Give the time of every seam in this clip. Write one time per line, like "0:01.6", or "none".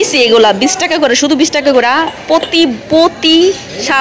none